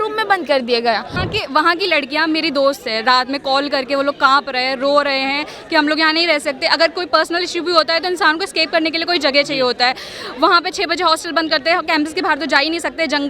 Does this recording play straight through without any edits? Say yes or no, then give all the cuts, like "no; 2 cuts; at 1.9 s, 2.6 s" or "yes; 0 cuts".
no; 1 cut; at 1.2 s